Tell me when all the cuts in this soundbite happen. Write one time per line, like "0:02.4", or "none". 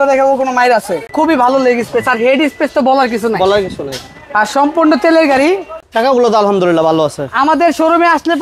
0:01.1
0:05.8